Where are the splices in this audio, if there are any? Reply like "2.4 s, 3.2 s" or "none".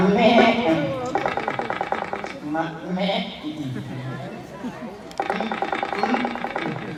none